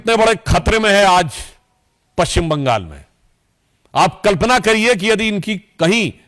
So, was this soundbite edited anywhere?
no; 0 cuts

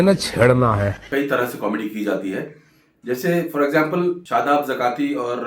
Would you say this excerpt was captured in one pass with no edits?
no; 2 cuts; at 1.0 s, 4.2 s

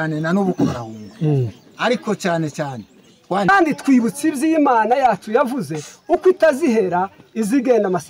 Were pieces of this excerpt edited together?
yes; 1 cut; at 3.5 s

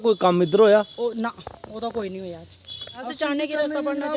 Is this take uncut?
no; 1 cut; at 3.0 s

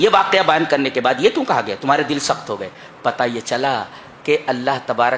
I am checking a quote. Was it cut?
no; 0 cuts

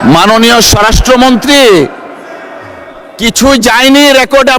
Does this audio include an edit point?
no; 0 cuts

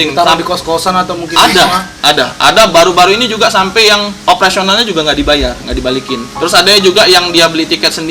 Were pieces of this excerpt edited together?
yes; 3 cuts; at 1.9 s, 4.1 s, 6.3 s

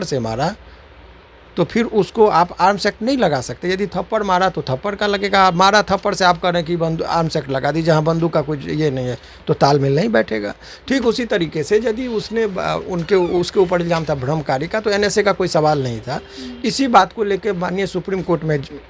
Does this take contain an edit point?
no; 0 cuts

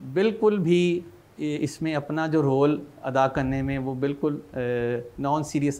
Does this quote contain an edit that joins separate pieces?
no; 0 cuts

